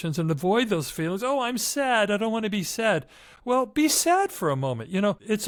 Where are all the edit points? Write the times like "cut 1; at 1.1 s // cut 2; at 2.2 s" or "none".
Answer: none